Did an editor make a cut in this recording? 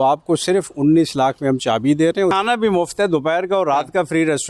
yes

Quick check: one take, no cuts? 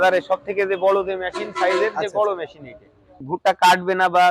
no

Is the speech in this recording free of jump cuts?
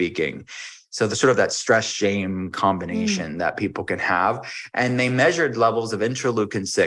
yes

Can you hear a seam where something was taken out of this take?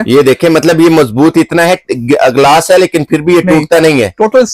no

